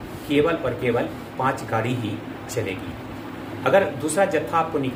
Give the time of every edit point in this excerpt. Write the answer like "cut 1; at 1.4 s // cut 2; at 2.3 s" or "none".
none